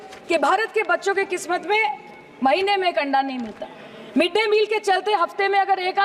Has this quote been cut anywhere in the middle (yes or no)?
no